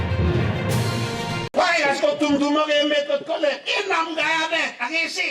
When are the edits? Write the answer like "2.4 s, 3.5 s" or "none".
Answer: 1.5 s